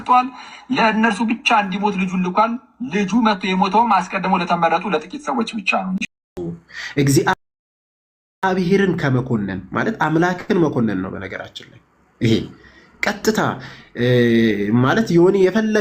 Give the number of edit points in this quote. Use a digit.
1